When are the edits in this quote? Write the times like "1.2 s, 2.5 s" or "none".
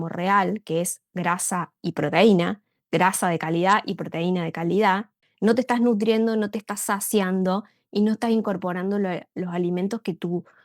5.2 s